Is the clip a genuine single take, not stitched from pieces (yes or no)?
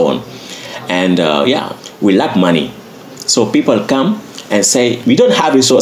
no